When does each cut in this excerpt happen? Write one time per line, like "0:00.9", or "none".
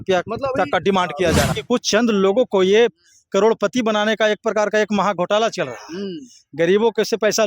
0:01.6

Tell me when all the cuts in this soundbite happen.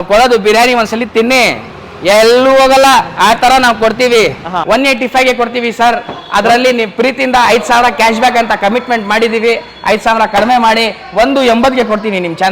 0:04.6

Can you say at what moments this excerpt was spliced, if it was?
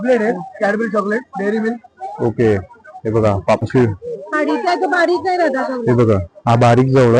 0:03.6

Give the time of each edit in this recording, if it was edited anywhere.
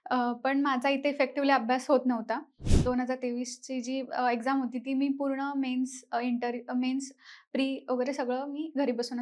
0:02.7

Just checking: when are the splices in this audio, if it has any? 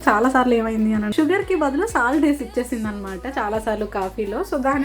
0:01.1

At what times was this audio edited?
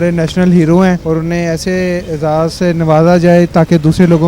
0:01.0

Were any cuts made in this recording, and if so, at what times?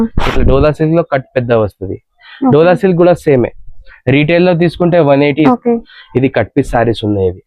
0:05.5

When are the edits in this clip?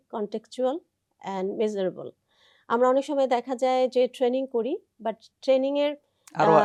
none

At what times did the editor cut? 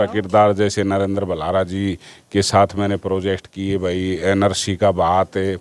none

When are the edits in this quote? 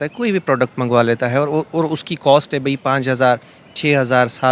none

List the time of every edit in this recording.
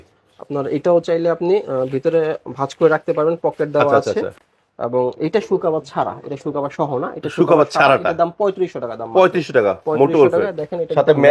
none

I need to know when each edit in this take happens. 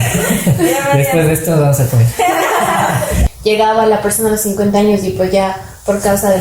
0:03.2

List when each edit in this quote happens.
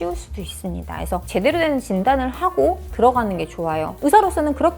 none

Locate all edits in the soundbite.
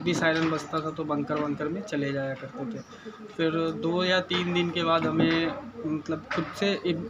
none

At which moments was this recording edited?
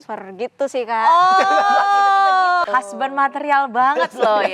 0:02.6

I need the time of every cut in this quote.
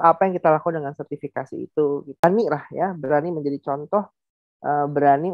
0:02.2

